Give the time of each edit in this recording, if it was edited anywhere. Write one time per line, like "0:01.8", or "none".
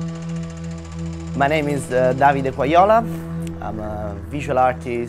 0:01.2